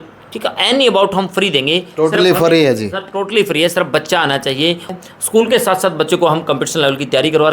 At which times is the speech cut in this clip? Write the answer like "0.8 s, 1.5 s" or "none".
4.9 s